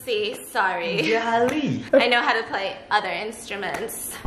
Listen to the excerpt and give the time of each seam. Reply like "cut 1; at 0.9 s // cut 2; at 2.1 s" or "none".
none